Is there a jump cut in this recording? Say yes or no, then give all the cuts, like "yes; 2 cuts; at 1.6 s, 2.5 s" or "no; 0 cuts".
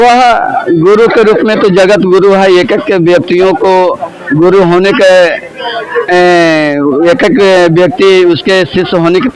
no; 0 cuts